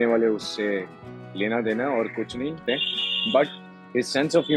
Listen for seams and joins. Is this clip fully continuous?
no; 1 cut; at 2.6 s

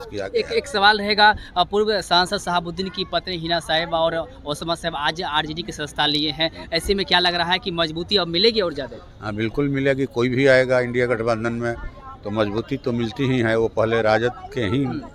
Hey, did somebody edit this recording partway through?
no; 0 cuts

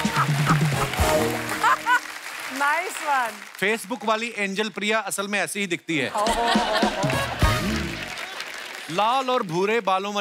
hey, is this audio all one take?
yes; 0 cuts

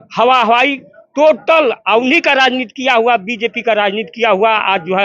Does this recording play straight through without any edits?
yes; 0 cuts

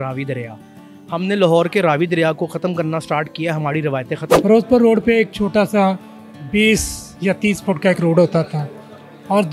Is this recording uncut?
no; 1 cut; at 4.4 s

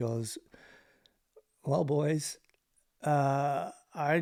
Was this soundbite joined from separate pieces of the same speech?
no; 0 cuts

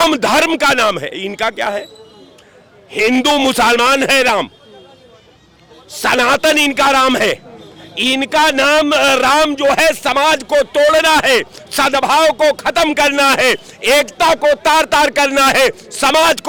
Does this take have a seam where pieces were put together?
no; 0 cuts

